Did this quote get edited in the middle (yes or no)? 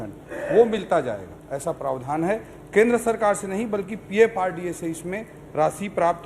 no